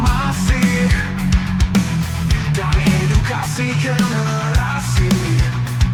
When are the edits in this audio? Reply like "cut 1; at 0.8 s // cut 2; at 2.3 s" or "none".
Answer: none